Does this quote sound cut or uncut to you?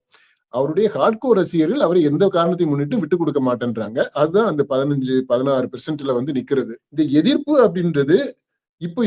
cut